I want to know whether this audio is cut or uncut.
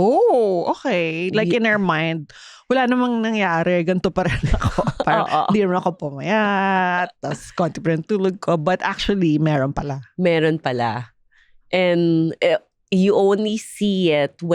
uncut